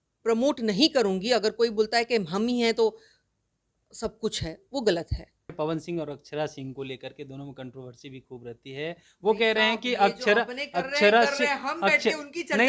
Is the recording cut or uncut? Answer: cut